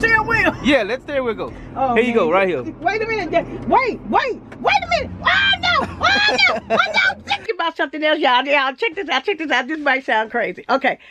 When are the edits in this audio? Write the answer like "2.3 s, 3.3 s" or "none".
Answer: 7.5 s

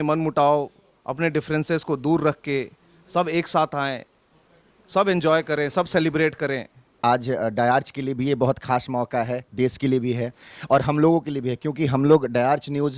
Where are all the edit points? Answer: 6.9 s

